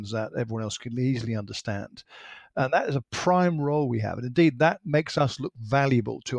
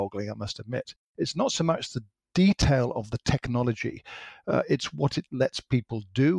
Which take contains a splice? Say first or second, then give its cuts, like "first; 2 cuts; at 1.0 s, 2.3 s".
second; 1 cut; at 1.0 s